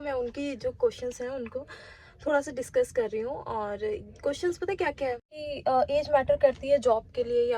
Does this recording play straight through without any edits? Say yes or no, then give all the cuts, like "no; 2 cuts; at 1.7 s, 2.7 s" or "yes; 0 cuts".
no; 1 cut; at 5.4 s